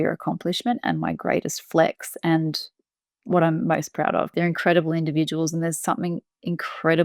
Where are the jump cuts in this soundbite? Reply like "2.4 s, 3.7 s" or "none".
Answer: 4.3 s